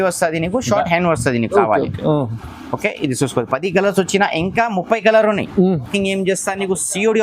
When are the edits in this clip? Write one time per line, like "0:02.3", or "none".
0:05.9

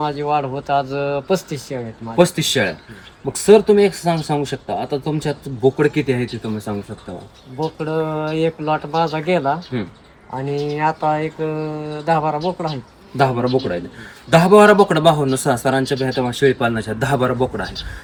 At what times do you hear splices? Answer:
none

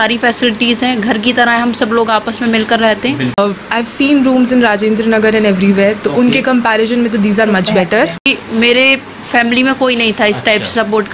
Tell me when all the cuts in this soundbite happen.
0:03.4
0:08.3

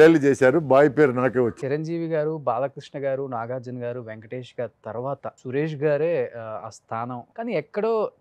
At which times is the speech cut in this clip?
0:01.5
0:05.4
0:07.2

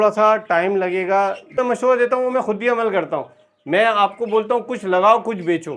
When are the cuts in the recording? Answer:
0:01.6

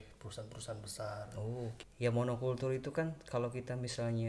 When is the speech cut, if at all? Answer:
0:01.8

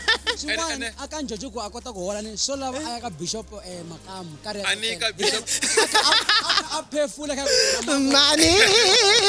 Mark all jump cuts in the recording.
none

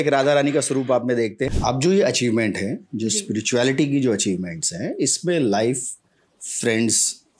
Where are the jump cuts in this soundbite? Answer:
0:01.5

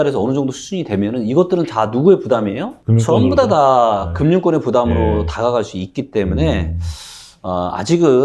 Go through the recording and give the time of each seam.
none

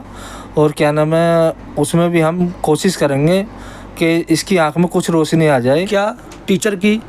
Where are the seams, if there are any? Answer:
0:05.9

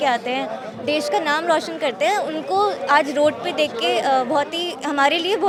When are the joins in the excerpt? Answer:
none

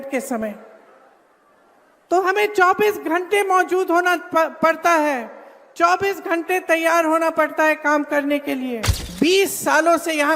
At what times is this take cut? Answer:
0:09.0

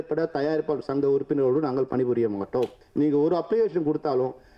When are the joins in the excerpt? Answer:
0:02.8

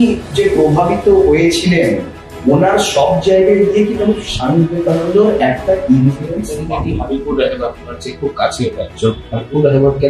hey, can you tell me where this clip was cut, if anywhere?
0:06.6

